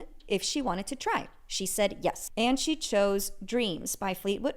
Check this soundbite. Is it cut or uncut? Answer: cut